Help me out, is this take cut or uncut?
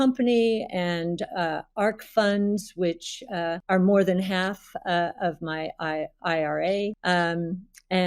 cut